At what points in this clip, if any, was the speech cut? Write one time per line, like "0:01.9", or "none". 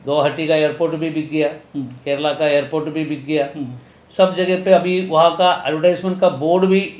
none